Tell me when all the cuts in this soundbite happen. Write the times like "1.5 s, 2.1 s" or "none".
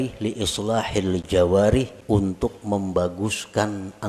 2.0 s